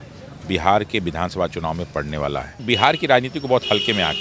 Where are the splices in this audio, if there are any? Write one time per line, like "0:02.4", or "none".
0:02.6